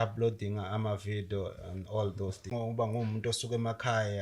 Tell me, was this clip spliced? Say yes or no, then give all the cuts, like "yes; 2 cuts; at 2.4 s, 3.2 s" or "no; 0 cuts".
yes; 1 cut; at 2.5 s